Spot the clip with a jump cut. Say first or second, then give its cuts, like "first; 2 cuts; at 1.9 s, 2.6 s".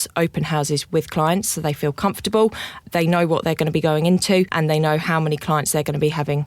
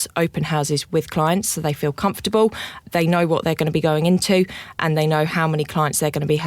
first; 1 cut; at 4.5 s